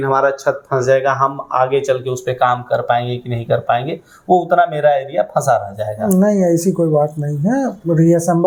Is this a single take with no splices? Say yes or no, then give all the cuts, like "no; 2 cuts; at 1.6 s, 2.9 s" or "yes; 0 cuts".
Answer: yes; 0 cuts